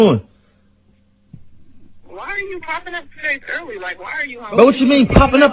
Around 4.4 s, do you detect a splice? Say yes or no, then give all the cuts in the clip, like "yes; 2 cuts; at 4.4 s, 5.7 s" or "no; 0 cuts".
yes; 1 cut; at 4.4 s